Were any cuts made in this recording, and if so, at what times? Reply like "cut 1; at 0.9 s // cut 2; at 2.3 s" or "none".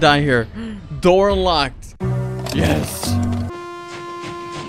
cut 1; at 3.5 s